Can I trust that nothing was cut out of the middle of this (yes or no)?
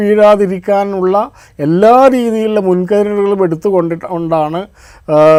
yes